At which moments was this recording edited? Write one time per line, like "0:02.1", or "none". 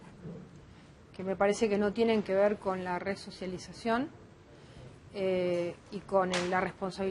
0:03.3

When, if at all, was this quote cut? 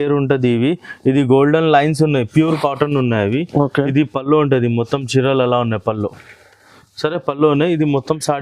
none

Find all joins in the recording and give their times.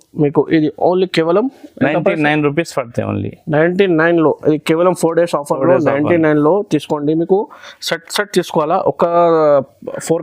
none

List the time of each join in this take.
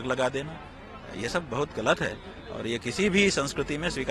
none

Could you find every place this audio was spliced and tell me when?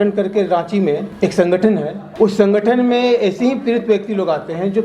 0:01.1
0:02.0

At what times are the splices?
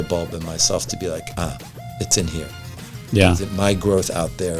none

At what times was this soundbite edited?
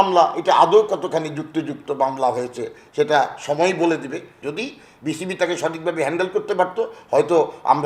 0:04.2

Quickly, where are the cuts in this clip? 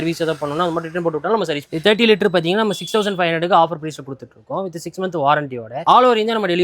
0:01.7

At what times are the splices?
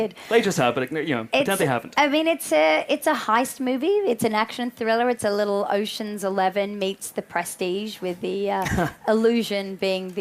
0:03.9

